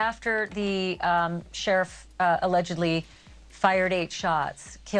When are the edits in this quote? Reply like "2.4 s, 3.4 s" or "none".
none